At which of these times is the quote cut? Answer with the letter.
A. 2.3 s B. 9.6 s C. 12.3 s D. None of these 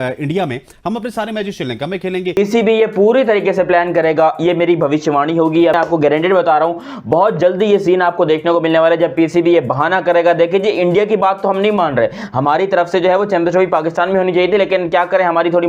A